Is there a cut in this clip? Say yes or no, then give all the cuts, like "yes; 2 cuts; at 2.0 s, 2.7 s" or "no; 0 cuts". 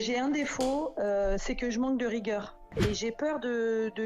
yes; 1 cut; at 2.7 s